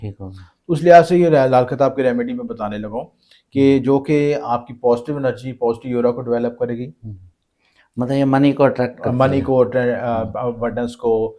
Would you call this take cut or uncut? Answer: uncut